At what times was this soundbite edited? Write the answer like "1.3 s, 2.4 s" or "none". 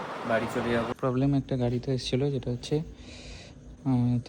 0.9 s